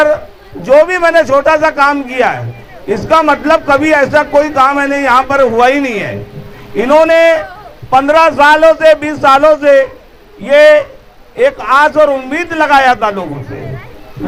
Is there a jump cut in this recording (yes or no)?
no